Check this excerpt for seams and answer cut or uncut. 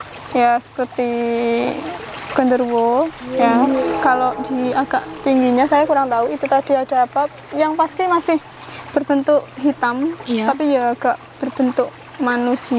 uncut